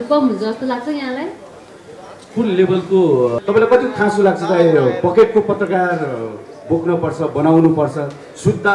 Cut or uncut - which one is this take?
cut